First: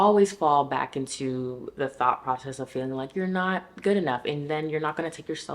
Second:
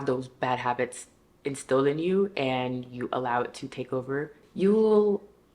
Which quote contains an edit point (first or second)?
second